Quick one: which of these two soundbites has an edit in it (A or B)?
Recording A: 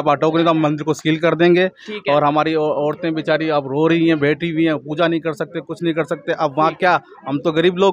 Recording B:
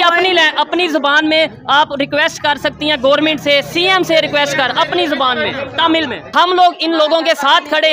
B